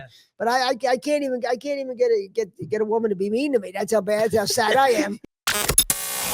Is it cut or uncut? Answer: cut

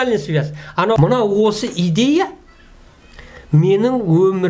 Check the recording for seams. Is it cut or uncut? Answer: cut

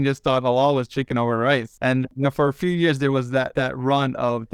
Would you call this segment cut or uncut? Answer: cut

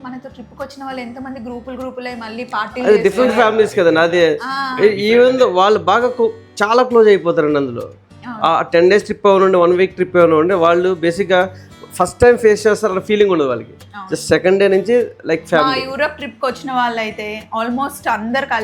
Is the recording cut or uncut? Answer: uncut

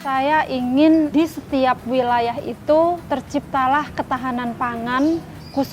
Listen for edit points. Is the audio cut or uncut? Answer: cut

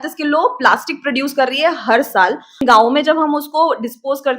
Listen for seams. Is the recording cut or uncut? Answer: cut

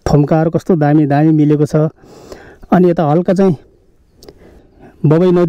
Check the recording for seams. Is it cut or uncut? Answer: cut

